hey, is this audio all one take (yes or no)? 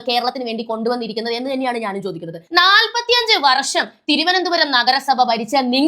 no